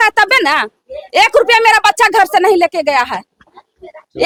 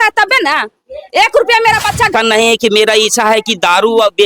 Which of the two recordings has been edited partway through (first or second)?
second